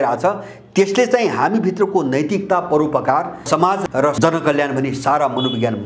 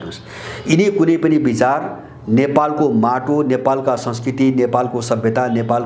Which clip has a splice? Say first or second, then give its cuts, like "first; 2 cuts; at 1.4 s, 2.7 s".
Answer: first; 1 cut; at 3.7 s